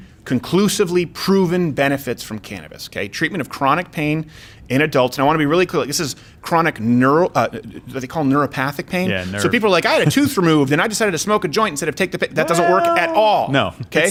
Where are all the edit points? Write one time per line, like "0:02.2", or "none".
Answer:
none